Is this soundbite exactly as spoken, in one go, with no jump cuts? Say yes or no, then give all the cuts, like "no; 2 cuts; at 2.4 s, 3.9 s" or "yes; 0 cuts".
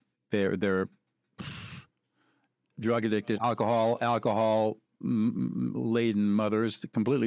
no; 1 cut; at 3.4 s